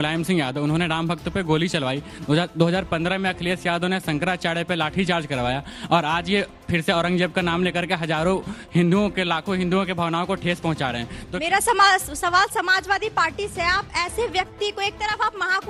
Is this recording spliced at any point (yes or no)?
no